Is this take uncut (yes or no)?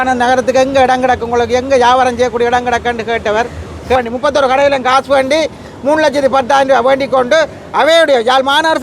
no